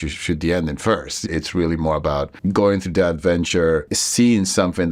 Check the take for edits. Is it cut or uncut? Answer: cut